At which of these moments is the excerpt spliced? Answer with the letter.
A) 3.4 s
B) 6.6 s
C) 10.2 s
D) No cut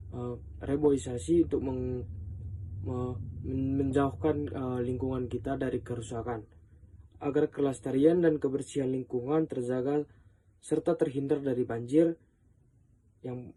D